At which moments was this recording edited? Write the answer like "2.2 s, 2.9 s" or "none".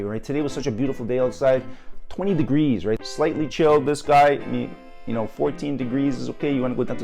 3.1 s